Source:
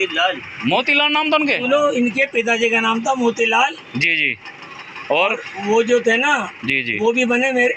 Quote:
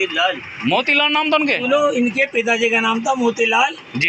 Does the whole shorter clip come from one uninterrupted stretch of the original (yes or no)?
yes